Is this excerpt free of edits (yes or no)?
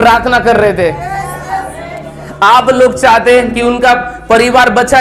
yes